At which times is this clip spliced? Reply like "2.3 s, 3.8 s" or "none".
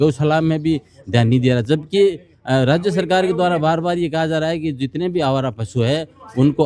none